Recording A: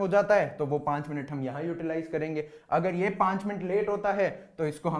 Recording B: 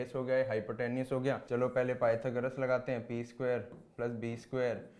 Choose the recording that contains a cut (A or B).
B